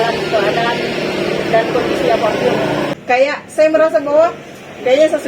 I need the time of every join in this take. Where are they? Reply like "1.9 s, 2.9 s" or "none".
2.9 s